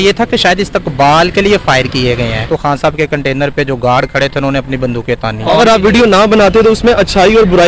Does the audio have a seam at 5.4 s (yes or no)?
yes